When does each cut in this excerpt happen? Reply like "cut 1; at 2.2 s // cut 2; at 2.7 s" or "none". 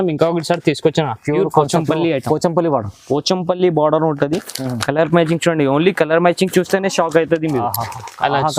none